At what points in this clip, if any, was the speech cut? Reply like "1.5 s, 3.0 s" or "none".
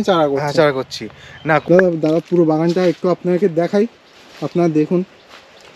1.6 s

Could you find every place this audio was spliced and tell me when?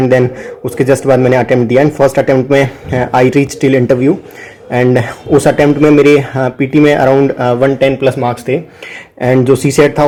none

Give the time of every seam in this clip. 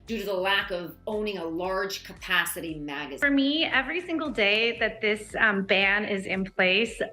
3.2 s

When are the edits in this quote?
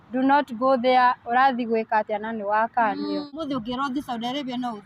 3.4 s

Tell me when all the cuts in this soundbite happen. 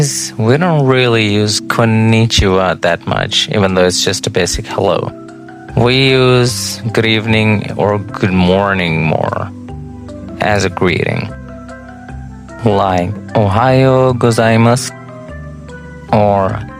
none

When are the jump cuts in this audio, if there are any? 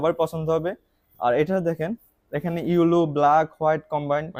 none

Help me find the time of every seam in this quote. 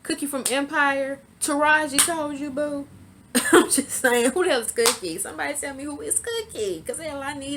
none

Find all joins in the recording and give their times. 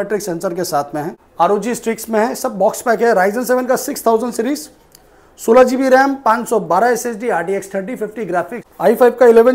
1.2 s, 8.6 s

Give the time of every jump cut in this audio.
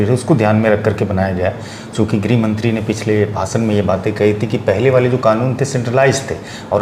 none

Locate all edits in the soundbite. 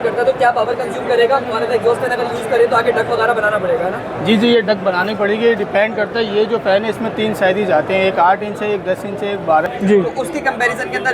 9.6 s

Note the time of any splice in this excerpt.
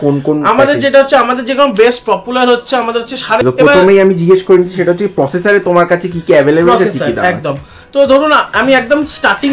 3.4 s

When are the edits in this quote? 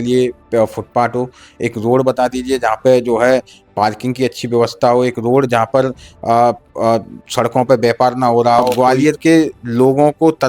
8.7 s

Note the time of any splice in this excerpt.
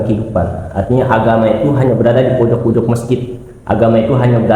none

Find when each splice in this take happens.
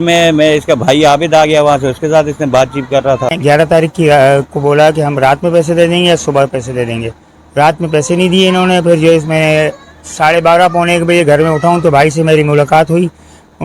3.4 s

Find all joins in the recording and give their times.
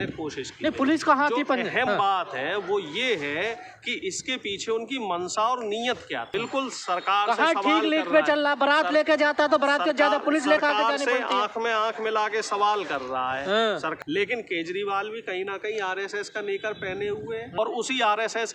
6.3 s, 13.9 s, 17.5 s

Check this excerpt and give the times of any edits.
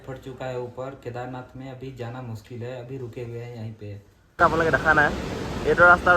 4.4 s

